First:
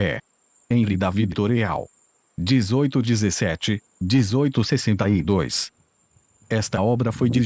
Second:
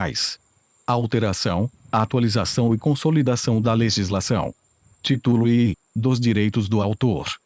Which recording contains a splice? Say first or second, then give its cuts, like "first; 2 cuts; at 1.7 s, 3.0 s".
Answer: first; 1 cut; at 1.1 s